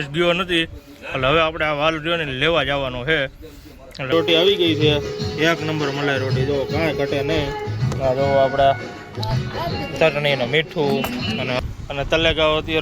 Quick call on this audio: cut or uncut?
cut